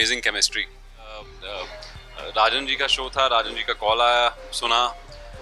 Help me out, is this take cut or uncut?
cut